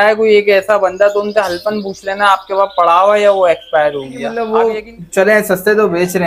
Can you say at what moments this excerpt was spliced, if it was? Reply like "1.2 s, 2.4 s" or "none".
4.3 s